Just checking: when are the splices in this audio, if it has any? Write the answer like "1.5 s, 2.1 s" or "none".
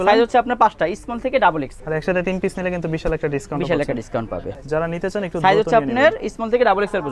1.7 s, 4.6 s